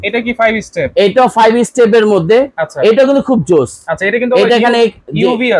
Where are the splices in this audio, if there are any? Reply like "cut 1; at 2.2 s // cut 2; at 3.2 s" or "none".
none